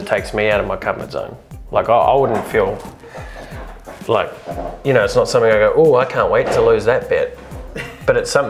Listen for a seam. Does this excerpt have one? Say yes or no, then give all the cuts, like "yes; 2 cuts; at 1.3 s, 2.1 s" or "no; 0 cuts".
no; 0 cuts